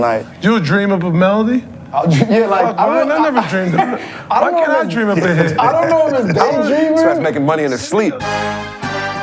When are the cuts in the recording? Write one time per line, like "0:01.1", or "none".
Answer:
0:07.9